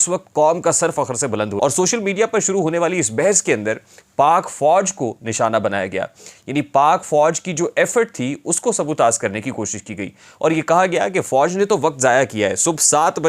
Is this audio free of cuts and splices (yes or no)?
no